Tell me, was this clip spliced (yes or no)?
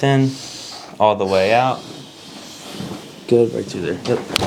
no